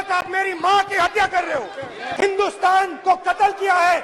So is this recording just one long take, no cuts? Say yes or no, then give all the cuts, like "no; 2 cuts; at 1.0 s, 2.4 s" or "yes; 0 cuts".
no; 1 cut; at 2.0 s